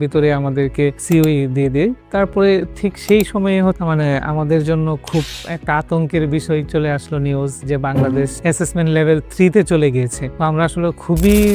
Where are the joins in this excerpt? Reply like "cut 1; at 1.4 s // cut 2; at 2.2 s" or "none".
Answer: cut 1; at 1.0 s // cut 2; at 3.8 s